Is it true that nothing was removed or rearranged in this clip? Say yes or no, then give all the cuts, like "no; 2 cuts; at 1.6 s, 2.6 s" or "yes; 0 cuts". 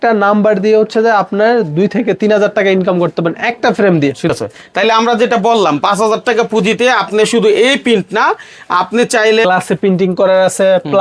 no; 2 cuts; at 4.3 s, 9.4 s